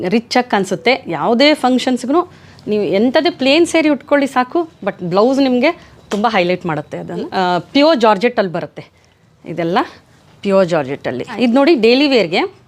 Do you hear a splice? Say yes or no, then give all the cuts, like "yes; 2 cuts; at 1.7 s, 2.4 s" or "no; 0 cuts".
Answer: yes; 2 cuts; at 7.3 s, 11.4 s